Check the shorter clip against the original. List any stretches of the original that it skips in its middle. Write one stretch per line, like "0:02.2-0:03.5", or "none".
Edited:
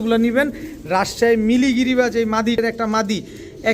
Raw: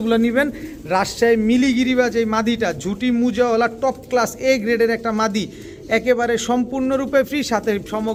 0:02.6-0:04.8